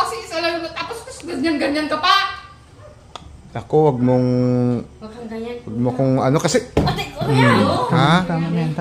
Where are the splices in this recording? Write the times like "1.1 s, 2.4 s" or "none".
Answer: none